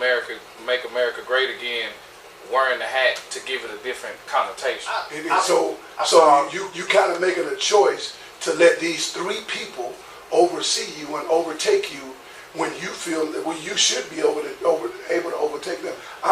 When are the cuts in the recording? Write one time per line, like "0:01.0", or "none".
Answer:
0:05.2